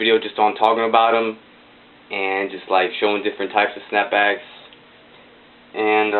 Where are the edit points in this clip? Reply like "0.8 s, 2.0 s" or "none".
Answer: 4.5 s